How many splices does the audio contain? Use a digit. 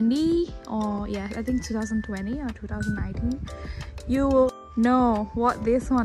1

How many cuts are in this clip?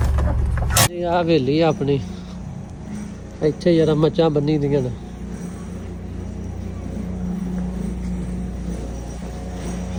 0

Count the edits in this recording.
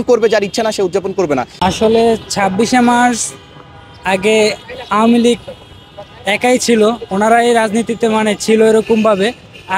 0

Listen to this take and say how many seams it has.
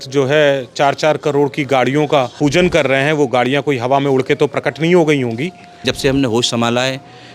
2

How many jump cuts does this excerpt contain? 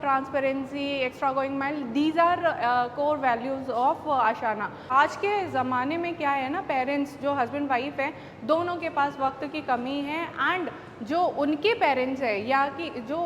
1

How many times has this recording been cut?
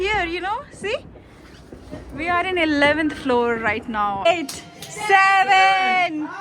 1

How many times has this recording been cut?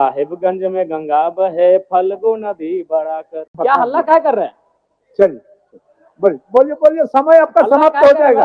1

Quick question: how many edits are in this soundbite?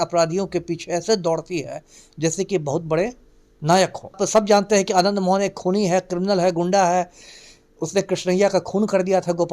1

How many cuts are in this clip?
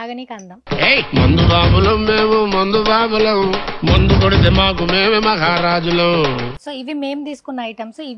1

